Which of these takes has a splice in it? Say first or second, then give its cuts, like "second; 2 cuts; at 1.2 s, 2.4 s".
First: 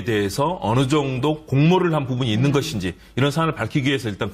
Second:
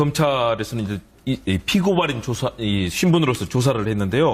first; 1 cut; at 1.4 s